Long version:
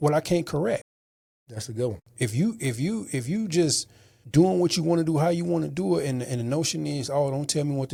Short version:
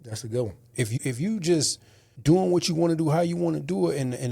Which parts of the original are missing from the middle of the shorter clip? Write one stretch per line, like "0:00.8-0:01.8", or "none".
0:02.4-0:03.0